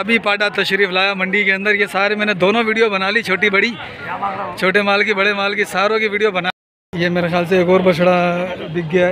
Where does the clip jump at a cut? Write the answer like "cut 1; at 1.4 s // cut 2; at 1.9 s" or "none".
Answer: cut 1; at 6.5 s